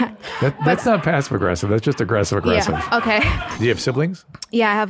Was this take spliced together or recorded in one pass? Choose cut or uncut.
cut